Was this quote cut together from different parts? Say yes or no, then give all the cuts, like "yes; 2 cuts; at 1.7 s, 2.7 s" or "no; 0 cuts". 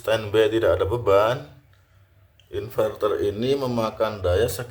no; 0 cuts